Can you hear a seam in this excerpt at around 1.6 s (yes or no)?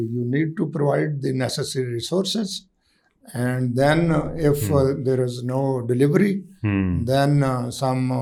no